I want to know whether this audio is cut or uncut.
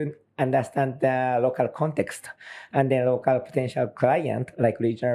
uncut